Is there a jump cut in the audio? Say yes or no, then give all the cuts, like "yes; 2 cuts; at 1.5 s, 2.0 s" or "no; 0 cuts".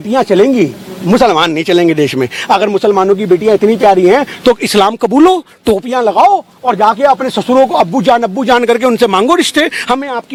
no; 0 cuts